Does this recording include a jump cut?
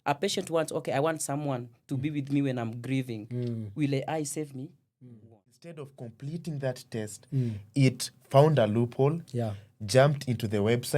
yes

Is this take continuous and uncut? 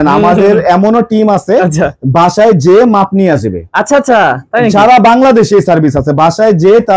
yes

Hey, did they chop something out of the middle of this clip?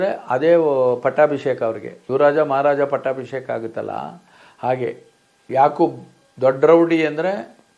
no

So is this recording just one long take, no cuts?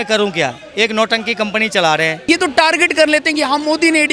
no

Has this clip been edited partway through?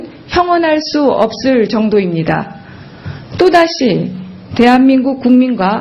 yes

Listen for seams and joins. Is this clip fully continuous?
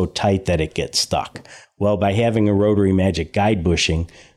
yes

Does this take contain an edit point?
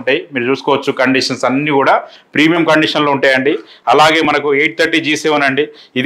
no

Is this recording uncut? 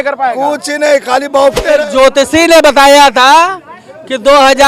no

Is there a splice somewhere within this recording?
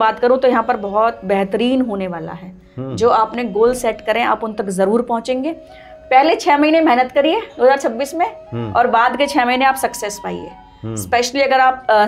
no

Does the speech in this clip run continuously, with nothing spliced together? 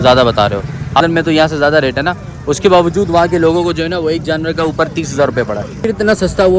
no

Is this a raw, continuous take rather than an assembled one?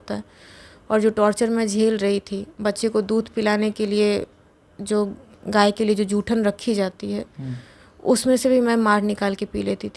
yes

